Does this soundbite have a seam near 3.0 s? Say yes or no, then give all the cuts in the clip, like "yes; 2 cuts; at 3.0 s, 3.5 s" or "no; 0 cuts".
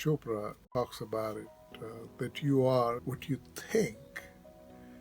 yes; 1 cut; at 3.0 s